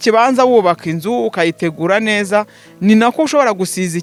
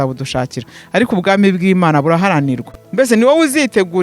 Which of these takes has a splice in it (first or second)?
second